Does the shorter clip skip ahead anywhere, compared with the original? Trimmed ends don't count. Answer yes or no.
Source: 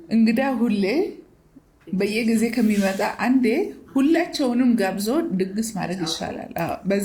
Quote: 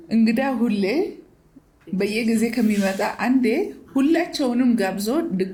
no